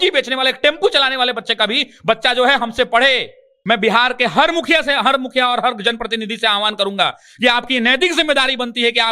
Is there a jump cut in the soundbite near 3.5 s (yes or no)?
yes